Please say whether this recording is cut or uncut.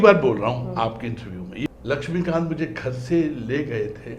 cut